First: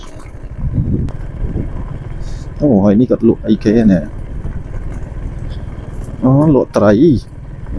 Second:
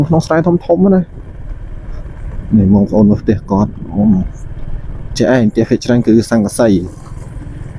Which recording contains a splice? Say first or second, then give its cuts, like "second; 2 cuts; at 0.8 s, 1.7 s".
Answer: first; 1 cut; at 1.0 s